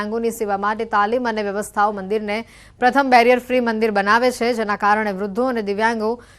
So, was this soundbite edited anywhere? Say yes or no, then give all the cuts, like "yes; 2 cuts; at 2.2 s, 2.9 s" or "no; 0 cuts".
yes; 1 cut; at 3.6 s